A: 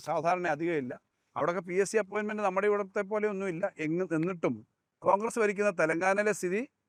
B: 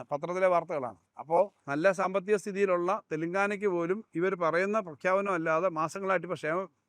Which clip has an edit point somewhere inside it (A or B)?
B